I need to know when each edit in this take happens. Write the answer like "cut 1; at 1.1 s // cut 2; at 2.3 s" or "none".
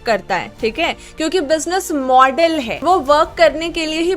cut 1; at 2.8 s